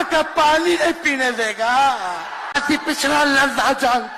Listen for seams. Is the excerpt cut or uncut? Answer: cut